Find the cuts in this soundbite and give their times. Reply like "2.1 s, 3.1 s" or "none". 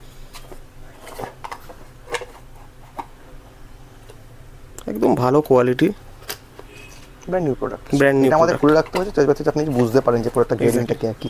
none